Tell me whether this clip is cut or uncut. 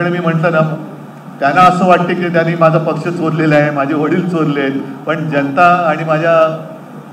uncut